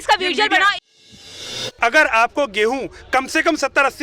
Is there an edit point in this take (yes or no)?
yes